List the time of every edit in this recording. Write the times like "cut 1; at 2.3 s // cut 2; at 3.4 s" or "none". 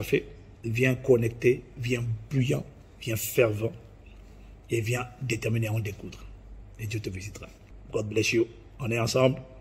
none